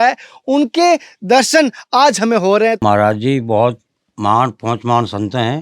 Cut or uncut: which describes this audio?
cut